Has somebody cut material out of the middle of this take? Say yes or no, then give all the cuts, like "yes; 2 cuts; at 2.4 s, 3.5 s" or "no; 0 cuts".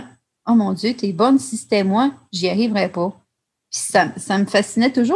no; 0 cuts